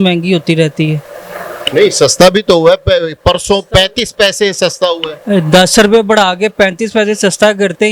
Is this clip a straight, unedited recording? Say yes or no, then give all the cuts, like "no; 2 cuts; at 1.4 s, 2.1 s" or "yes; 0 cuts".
yes; 0 cuts